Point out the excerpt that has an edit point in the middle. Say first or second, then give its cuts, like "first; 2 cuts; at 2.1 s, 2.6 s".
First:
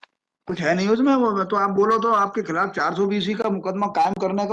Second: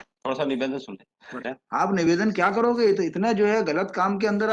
second; 1 cut; at 1.3 s